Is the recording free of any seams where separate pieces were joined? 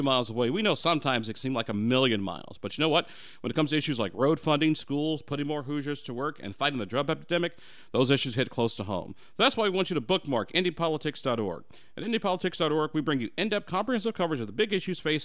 yes; 0 cuts

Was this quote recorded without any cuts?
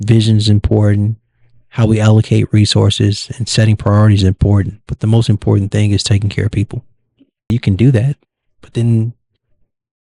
no; 1 cut; at 7.5 s

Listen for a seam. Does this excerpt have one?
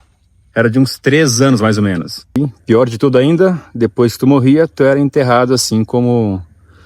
yes; 1 cut; at 2.3 s

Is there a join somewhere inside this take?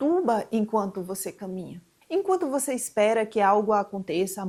no; 0 cuts

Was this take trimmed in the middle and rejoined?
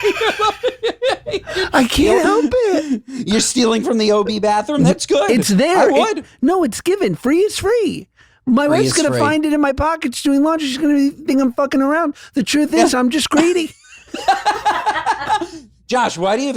no; 0 cuts

